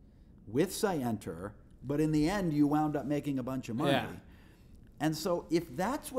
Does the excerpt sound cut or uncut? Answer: uncut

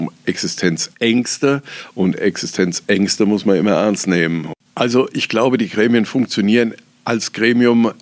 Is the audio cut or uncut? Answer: cut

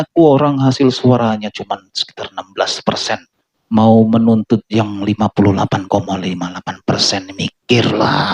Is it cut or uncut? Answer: uncut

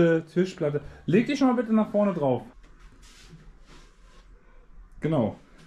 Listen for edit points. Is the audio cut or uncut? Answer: cut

